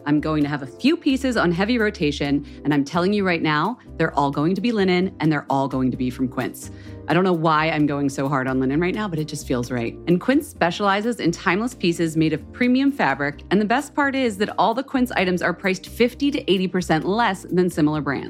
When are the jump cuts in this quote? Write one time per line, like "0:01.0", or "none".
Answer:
none